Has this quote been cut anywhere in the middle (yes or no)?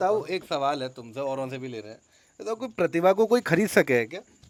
no